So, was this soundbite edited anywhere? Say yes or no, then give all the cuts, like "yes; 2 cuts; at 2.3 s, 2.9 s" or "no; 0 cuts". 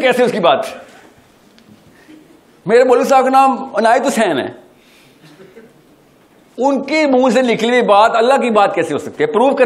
no; 0 cuts